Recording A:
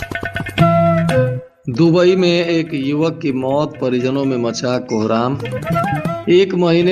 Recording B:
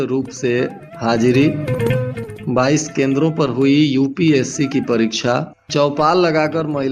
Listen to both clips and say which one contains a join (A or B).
A